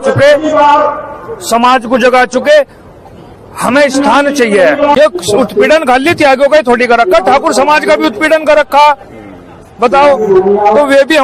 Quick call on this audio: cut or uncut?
cut